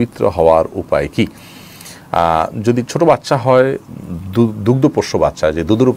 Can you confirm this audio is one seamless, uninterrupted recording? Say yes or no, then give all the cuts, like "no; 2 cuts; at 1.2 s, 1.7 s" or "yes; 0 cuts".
yes; 0 cuts